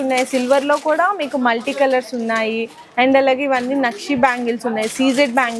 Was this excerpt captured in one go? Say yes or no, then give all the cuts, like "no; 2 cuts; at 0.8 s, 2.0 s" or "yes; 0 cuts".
yes; 0 cuts